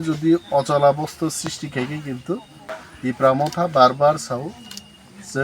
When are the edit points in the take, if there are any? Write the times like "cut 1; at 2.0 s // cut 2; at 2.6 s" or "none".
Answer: cut 1; at 2.6 s